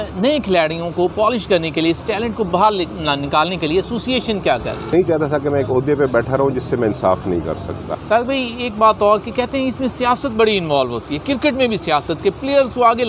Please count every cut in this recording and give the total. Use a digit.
2